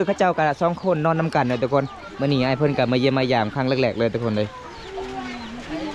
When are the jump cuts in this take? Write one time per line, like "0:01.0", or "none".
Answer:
none